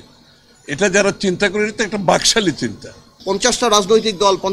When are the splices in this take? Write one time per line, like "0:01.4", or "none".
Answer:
0:03.1